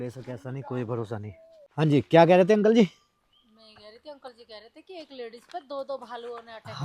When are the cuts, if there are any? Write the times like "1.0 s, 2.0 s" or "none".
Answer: 1.8 s